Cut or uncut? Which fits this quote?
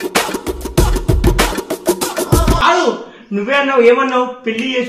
cut